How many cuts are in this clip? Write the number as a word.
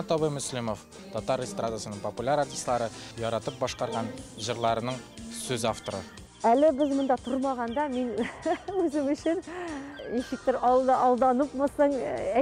four